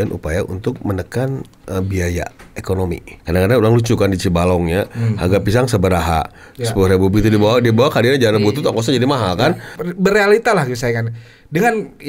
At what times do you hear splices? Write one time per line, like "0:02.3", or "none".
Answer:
0:03.1
0:09.7